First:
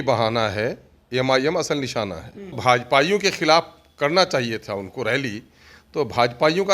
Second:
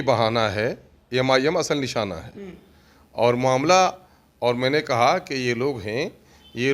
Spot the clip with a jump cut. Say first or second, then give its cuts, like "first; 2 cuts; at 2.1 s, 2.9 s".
first; 1 cut; at 2.6 s